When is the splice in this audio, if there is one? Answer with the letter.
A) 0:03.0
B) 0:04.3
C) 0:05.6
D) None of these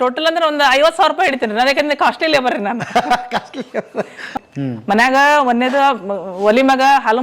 B